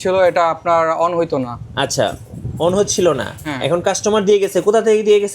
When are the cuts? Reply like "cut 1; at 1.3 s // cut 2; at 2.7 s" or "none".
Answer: none